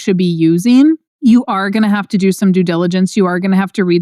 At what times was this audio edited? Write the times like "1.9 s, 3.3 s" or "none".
1.1 s